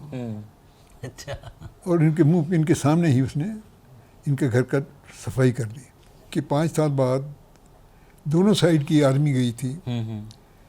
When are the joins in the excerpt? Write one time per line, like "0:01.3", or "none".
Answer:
0:05.9